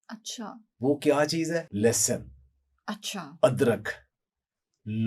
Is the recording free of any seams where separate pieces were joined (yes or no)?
no